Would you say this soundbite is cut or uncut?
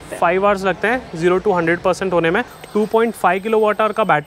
cut